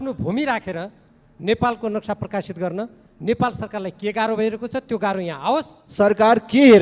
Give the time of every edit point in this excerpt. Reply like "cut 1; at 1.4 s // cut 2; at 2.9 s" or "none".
cut 1; at 5.8 s